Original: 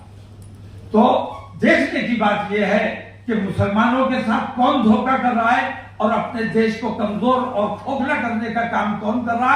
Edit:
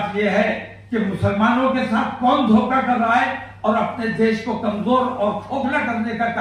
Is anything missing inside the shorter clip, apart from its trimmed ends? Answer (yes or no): no